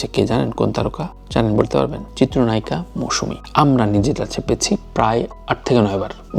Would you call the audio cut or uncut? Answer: uncut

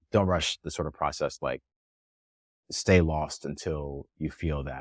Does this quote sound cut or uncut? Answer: uncut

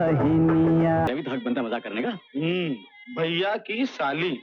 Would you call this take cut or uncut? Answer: cut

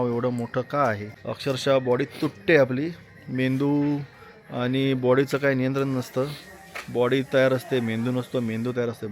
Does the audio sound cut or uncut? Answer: uncut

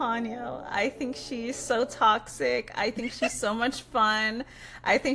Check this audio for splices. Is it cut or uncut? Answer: uncut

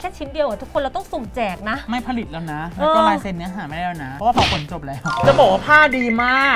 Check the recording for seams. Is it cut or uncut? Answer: uncut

